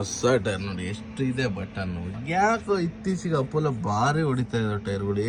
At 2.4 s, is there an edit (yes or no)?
no